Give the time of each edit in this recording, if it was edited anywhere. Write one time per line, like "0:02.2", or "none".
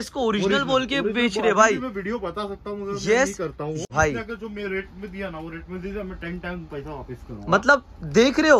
0:03.9